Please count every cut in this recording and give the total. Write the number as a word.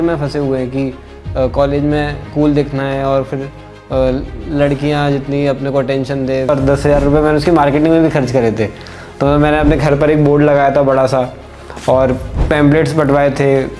one